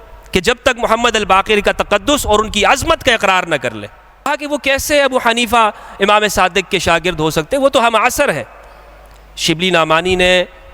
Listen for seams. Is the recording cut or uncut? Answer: cut